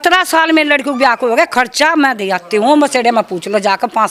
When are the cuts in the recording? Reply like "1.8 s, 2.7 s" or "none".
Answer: none

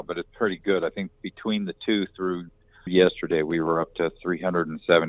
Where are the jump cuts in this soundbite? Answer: 2.9 s

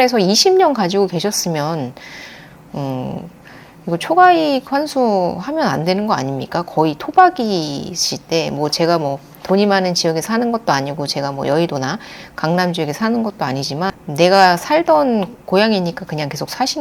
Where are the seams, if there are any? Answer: 14.0 s

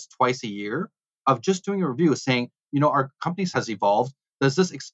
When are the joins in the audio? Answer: 3.5 s

